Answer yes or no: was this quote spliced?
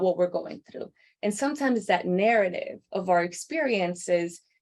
no